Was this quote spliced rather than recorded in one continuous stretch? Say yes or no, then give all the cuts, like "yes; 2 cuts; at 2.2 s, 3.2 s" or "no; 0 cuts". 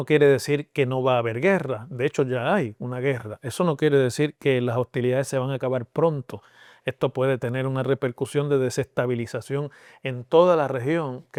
no; 0 cuts